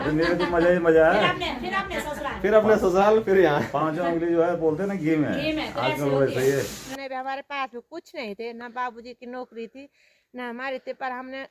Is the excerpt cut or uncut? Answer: cut